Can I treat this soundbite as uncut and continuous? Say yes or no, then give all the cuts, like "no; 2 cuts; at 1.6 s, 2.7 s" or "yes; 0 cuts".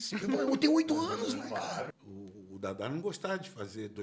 no; 1 cut; at 2.0 s